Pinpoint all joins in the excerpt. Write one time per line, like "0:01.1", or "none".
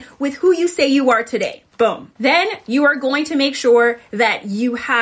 0:02.1